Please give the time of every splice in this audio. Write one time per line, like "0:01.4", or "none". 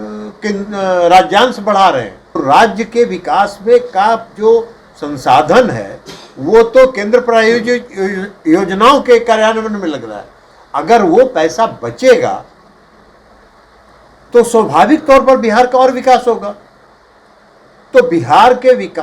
0:02.2